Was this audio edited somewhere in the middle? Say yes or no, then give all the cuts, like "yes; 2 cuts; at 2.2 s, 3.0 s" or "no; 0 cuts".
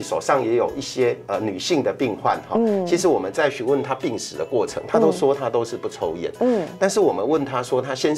no; 0 cuts